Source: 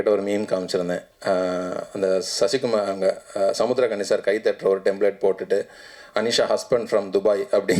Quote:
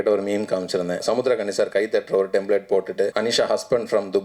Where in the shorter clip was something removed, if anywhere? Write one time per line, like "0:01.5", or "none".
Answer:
0:01.0
0:03.1